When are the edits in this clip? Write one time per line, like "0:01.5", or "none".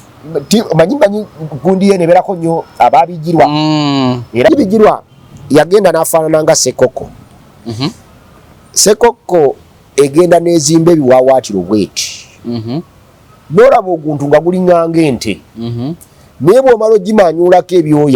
0:04.5

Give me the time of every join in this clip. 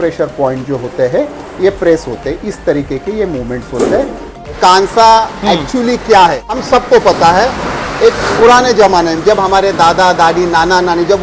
0:04.5
0:06.5

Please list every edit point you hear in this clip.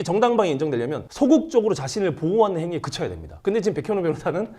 0:03.3

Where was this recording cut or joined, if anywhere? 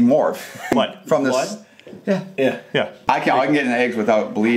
0:00.7
0:03.0

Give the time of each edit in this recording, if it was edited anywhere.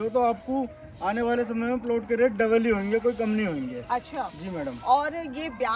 none

